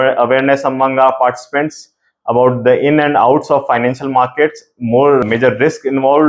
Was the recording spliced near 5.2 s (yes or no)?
yes